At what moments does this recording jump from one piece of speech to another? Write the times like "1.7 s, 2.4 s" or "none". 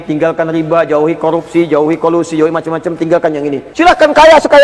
3.6 s

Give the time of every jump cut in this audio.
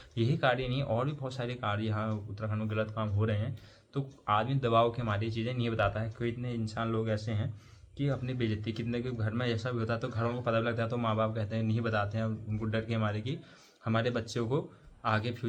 none

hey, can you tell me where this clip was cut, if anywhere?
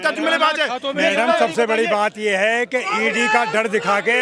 none

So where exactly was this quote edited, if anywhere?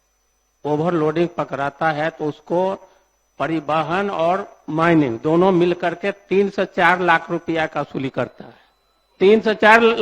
none

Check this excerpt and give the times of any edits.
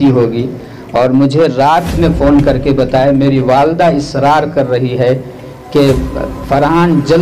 none

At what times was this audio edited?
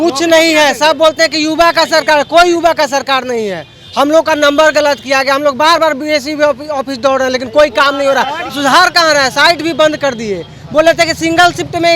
8.5 s

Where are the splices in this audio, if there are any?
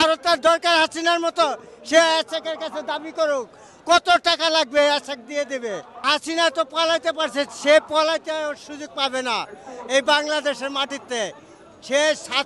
none

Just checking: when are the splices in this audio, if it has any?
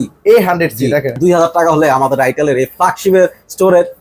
1.2 s

